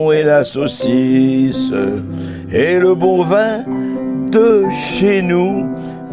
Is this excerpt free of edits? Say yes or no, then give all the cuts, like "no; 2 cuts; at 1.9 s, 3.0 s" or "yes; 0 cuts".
yes; 0 cuts